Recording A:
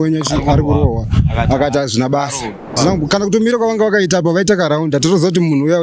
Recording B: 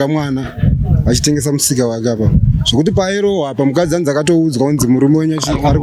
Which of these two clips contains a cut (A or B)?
A